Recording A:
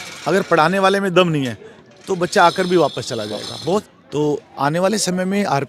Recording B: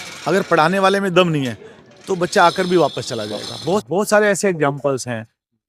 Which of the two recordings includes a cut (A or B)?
A